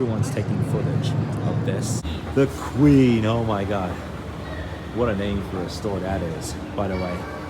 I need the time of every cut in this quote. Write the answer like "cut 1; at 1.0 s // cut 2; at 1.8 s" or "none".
cut 1; at 2.0 s